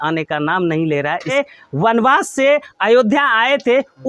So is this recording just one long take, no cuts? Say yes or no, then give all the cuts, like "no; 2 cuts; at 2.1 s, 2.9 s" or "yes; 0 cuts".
no; 1 cut; at 1.3 s